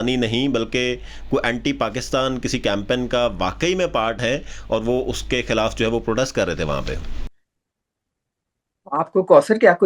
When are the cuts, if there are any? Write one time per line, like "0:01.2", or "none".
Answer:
none

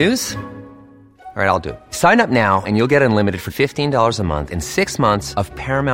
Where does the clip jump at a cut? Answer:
none

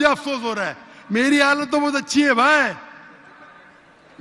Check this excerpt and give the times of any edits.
none

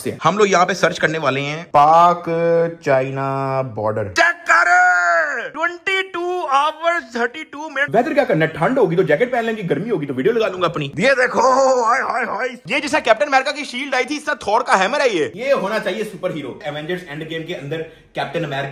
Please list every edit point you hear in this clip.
0:04.1
0:07.8
0:10.9
0:12.6
0:15.4
0:16.6

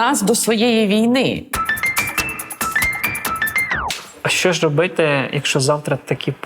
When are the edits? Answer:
0:01.5
0:04.1

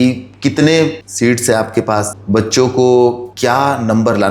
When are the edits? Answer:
0:01.0
0:02.2
0:03.3

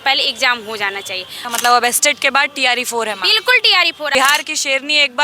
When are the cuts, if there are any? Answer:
0:01.3
0:04.1

